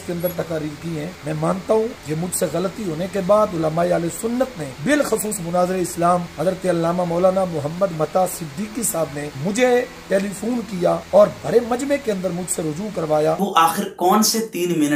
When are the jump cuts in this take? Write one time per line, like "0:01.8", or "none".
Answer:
0:01.2
0:02.0
0:04.7
0:06.3
0:09.3
0:11.0
0:13.4